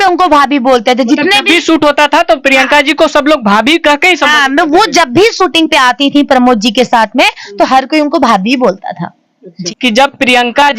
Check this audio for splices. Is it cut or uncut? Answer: cut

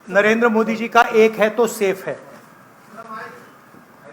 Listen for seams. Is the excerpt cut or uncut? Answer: uncut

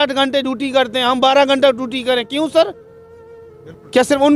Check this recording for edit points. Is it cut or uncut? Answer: uncut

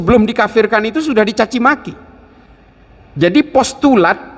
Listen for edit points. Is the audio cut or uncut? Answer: uncut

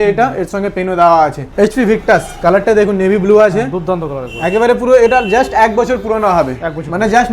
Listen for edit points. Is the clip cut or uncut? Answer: cut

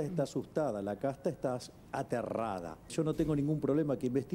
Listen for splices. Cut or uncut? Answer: cut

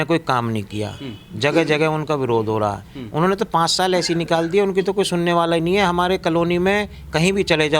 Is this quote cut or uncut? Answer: uncut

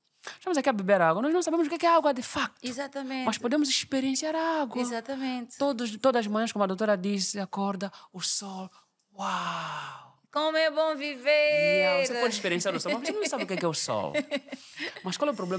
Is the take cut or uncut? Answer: uncut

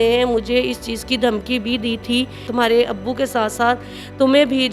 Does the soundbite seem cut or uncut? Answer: cut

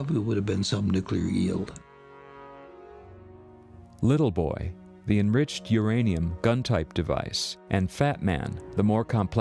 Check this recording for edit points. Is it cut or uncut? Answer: uncut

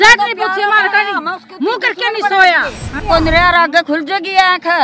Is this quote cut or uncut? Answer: cut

